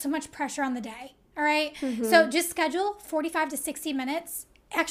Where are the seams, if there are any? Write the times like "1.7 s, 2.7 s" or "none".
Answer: none